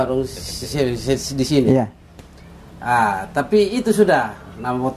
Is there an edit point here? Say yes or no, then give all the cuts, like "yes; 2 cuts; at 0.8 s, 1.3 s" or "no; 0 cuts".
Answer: no; 0 cuts